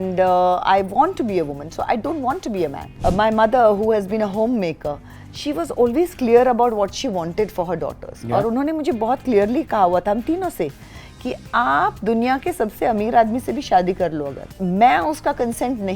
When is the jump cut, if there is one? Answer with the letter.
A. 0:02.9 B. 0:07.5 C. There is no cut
A